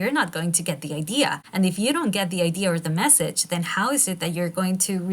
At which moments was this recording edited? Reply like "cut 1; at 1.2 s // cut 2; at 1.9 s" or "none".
cut 1; at 1.4 s